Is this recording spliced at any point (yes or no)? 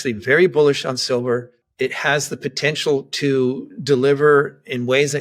no